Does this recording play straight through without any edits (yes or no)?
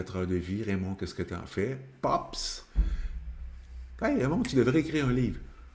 yes